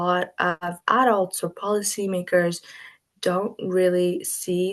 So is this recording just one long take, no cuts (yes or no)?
yes